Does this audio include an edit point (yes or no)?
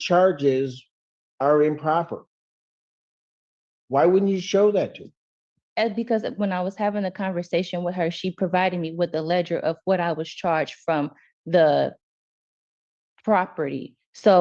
no